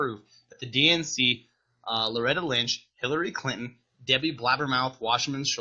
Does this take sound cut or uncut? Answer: uncut